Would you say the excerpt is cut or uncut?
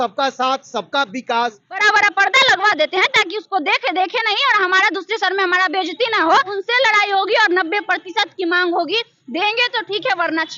cut